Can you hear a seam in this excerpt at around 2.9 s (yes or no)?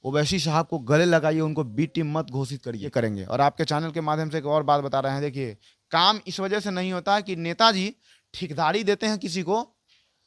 yes